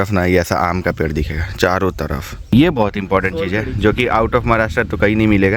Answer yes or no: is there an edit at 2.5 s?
yes